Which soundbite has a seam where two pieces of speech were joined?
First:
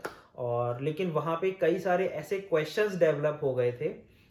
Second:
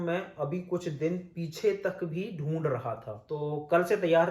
second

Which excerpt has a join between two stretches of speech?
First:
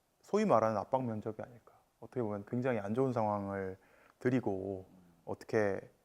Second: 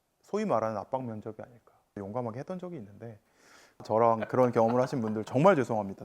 second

